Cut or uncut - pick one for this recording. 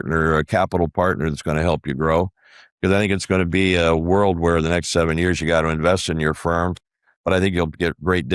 uncut